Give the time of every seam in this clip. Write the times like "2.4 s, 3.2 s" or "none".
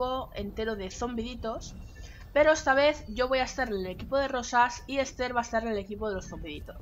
none